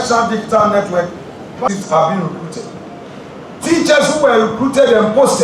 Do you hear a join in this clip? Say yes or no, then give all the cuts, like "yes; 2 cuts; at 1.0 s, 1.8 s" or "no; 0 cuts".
yes; 1 cut; at 1.7 s